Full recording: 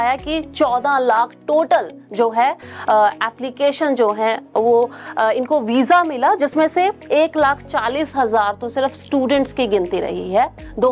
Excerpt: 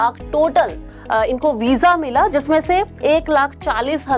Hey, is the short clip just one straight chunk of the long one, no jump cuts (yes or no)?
no